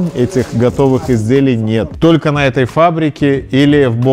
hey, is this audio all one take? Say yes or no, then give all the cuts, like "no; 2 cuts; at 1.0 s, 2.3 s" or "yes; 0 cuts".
no; 1 cut; at 1.9 s